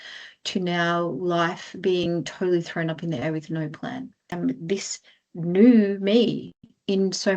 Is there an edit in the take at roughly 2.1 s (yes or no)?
no